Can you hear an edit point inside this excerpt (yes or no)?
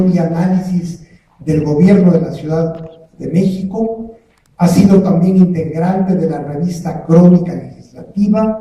yes